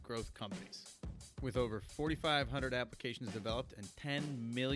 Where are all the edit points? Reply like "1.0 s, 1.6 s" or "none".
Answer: none